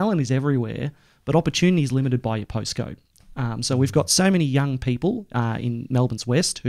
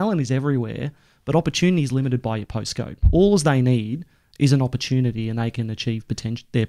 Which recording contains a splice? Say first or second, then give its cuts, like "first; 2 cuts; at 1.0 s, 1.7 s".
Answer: second; 1 cut; at 3.0 s